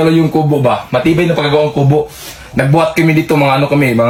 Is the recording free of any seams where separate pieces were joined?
yes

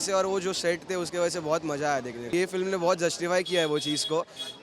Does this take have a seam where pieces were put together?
no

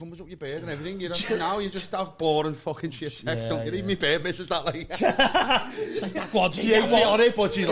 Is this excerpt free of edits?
yes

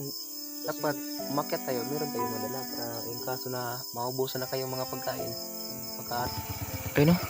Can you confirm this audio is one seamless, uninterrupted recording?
no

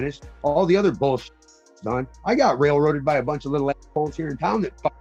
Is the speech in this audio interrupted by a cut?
no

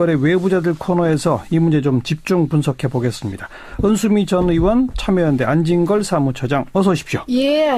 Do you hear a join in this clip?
no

